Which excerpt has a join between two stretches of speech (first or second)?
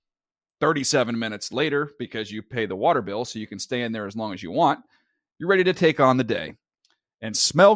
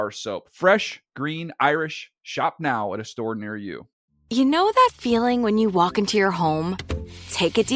second